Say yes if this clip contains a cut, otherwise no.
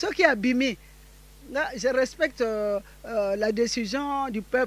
no